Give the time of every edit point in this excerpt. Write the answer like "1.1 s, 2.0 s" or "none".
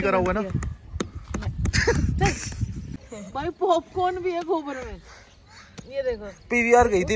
3.0 s